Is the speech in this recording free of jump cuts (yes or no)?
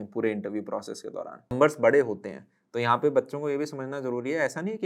no